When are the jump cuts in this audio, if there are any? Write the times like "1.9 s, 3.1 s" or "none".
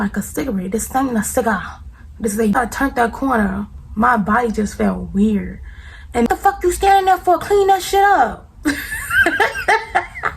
2.5 s, 6.3 s